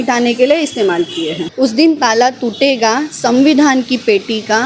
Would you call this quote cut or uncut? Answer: cut